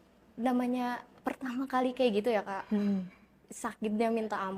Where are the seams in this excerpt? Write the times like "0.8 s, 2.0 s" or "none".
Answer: none